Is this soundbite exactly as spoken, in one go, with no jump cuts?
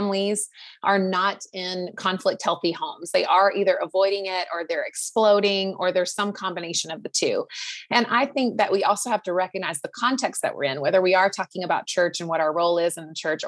yes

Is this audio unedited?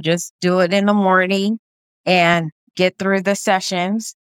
yes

